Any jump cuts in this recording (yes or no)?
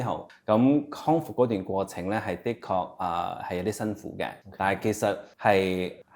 no